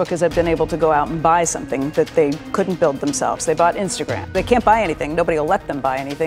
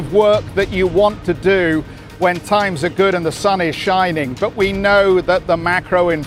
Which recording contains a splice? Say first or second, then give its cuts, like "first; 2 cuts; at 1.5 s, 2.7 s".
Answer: first; 1 cut; at 4.3 s